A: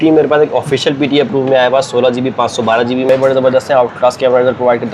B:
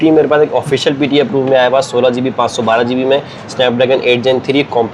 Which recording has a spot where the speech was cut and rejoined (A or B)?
A